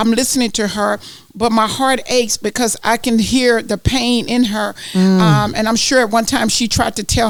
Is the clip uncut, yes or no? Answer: yes